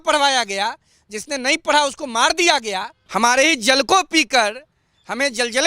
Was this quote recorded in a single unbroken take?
no; 1 cut; at 2.9 s

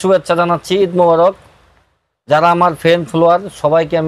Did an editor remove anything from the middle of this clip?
no; 0 cuts

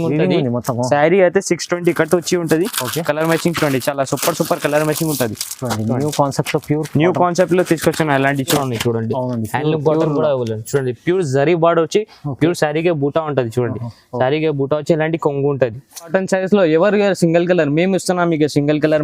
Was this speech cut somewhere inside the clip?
yes; 2 cuts; at 8.6 s, 16.1 s

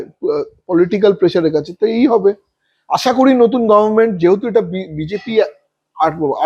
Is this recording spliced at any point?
no; 0 cuts

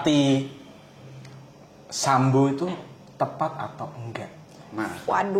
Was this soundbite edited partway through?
no; 0 cuts

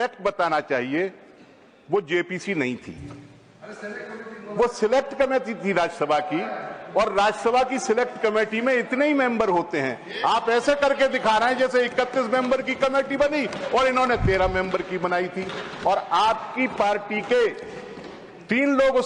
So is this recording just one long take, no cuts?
yes; 0 cuts

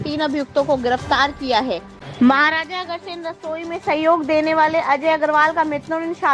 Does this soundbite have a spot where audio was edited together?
yes; 1 cut; at 2.0 s

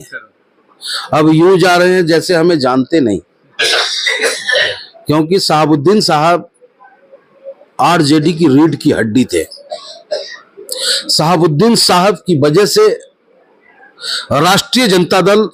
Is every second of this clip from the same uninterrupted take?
yes; 0 cuts

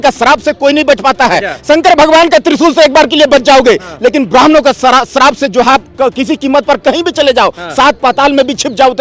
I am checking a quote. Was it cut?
no; 0 cuts

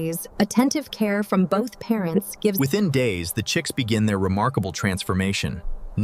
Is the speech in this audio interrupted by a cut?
no; 0 cuts

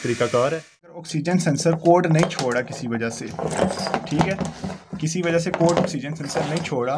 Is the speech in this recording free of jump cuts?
no; 1 cut; at 1.1 s

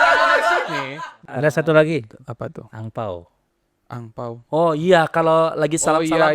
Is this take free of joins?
no; 1 cut; at 1.3 s

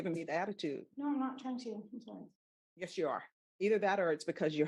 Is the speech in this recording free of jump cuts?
yes; 0 cuts

